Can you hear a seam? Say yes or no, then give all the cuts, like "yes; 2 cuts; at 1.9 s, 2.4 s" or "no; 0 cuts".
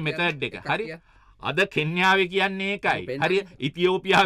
no; 0 cuts